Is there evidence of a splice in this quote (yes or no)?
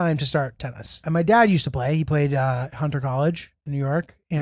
yes